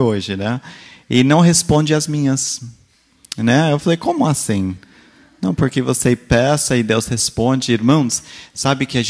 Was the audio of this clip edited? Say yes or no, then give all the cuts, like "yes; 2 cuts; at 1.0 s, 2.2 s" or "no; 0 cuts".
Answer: yes; 1 cut; at 6.3 s